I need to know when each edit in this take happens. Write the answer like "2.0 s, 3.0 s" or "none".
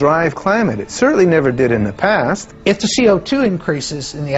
2.5 s